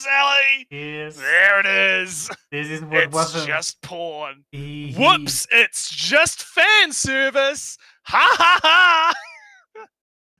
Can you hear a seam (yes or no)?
no